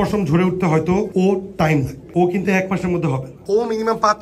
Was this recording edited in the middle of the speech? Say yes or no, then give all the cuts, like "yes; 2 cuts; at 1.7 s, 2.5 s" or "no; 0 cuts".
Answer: yes; 3 cuts; at 1.1 s, 2.0 s, 3.3 s